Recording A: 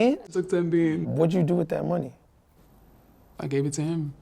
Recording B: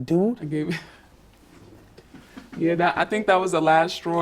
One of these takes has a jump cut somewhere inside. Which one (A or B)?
A